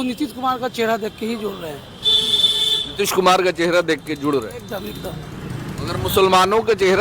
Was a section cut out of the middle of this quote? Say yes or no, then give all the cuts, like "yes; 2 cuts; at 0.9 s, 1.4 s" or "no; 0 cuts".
no; 0 cuts